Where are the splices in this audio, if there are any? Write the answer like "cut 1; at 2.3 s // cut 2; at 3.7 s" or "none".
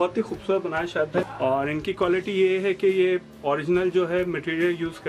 cut 1; at 1.2 s